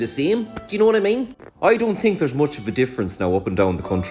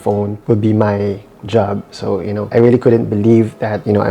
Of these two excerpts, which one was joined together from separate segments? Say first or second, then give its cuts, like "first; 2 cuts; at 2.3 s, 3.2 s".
second; 1 cut; at 2.5 s